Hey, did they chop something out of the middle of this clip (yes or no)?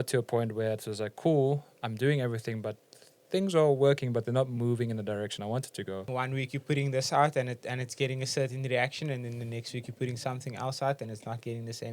yes